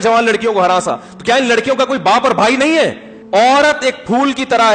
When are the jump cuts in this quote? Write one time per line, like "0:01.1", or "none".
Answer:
0:03.1